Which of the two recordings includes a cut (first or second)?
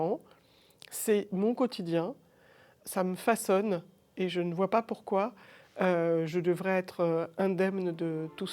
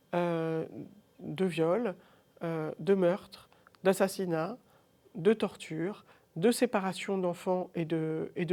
first